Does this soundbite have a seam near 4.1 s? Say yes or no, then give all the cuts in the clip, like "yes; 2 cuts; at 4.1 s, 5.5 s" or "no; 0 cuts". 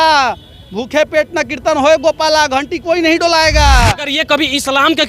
yes; 1 cut; at 4.1 s